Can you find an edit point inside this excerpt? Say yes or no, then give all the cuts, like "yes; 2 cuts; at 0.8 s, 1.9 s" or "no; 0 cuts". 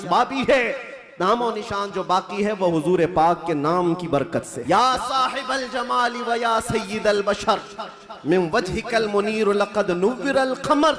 yes; 1 cut; at 4.5 s